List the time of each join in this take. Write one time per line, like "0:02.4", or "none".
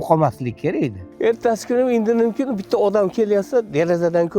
0:01.0